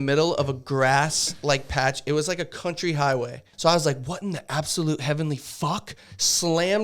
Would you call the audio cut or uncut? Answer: cut